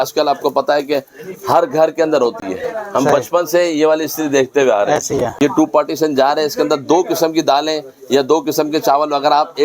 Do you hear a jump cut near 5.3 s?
yes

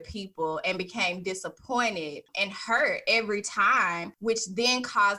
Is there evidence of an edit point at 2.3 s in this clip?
yes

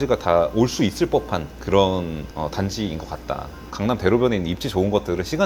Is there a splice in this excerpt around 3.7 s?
yes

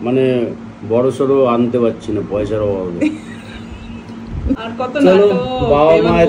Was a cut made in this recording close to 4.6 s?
yes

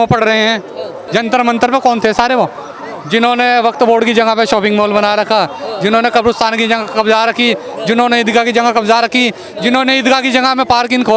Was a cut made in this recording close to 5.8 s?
no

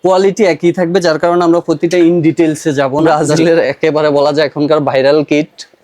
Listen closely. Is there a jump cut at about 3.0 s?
yes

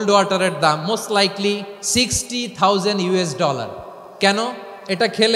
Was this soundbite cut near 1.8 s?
yes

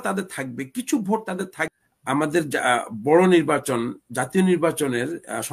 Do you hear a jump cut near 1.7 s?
yes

